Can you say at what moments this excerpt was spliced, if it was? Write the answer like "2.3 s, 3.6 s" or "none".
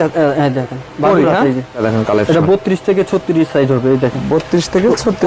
1.8 s